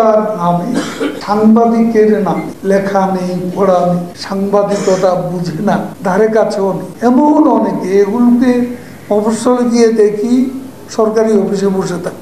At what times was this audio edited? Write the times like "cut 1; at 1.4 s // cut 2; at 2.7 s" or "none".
cut 1; at 1.2 s // cut 2; at 2.5 s // cut 3; at 4.2 s // cut 4; at 5.9 s // cut 5; at 6.9 s